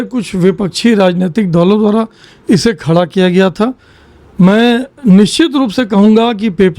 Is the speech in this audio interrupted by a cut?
no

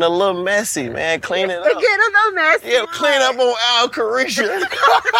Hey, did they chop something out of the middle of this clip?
yes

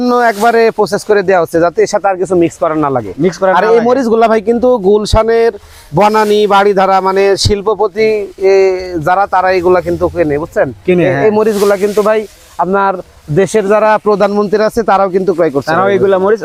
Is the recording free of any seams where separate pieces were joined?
yes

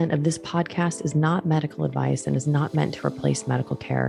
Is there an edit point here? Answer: no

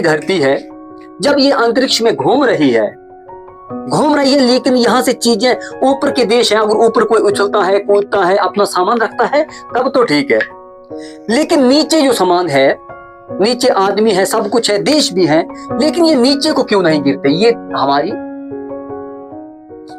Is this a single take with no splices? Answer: no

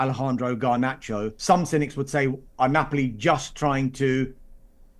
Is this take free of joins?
no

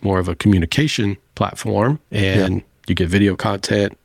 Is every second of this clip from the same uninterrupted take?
yes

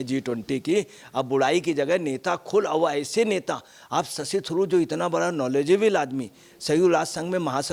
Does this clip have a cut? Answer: no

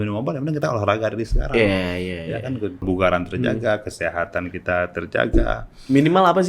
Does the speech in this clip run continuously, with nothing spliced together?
no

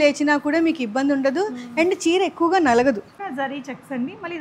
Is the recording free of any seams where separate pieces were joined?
no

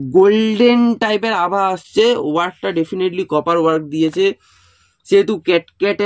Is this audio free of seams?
yes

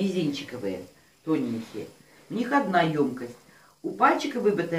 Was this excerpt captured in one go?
yes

